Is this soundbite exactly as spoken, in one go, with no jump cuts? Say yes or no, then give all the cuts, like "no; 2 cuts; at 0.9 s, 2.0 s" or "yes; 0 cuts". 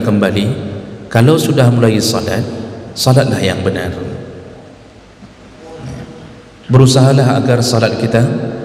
yes; 0 cuts